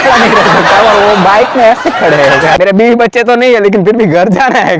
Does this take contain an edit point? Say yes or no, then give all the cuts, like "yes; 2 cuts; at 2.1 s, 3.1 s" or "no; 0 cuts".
yes; 1 cut; at 2.8 s